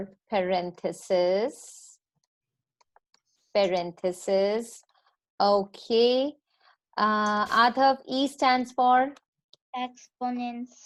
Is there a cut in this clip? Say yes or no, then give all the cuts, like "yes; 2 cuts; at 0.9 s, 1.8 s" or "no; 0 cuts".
no; 0 cuts